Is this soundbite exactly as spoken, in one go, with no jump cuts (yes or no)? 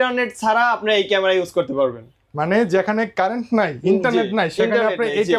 yes